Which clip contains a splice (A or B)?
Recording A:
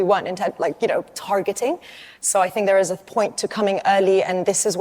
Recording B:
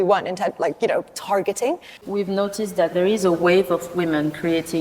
B